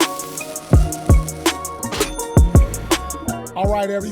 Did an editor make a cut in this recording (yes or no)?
no